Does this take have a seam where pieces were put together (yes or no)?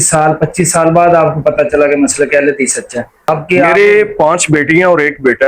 yes